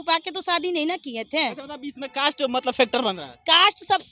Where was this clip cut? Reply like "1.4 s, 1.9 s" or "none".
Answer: none